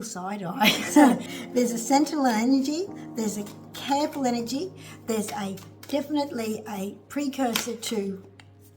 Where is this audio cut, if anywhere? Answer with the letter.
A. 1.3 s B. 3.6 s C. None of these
A